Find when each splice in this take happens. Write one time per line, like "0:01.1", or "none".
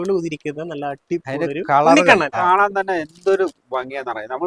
0:02.4